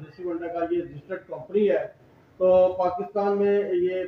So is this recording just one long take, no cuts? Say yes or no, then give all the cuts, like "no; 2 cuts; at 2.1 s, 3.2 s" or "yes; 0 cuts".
yes; 0 cuts